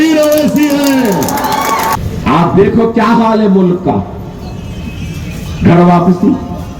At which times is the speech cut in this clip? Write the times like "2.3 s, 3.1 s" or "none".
1.9 s